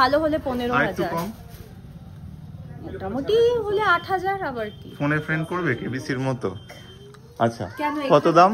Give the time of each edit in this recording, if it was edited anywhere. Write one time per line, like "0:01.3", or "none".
none